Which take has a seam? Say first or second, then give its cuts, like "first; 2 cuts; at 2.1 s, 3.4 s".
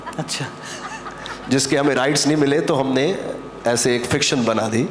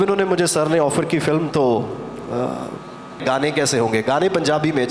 second; 1 cut; at 3.2 s